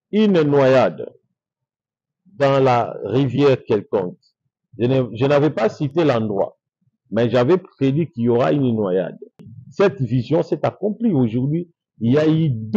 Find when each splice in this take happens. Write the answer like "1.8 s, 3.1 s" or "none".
9.6 s